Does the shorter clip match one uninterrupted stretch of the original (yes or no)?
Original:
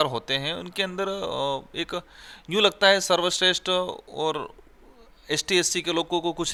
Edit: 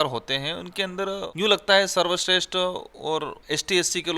no